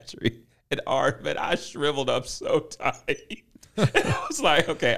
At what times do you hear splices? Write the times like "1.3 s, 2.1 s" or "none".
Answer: none